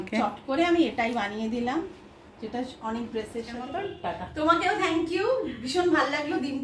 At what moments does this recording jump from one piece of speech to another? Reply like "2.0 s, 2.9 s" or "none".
3.8 s